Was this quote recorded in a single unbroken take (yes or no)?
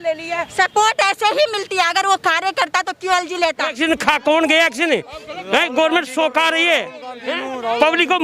no